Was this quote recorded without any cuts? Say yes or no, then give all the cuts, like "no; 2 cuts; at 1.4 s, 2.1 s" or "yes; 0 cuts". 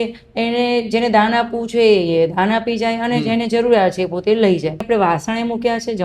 no; 1 cut; at 4.8 s